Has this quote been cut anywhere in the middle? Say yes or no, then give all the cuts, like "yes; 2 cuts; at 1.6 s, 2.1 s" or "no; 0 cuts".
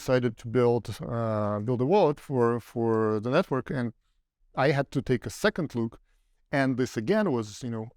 no; 0 cuts